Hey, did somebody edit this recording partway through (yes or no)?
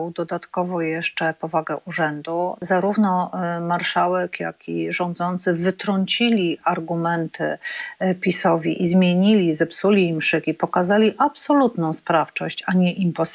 yes